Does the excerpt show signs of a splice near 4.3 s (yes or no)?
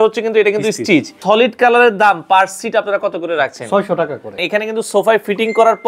yes